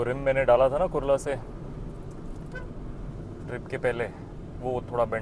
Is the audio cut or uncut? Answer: uncut